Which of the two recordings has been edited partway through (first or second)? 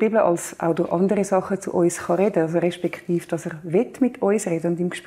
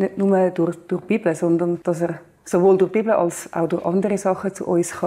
second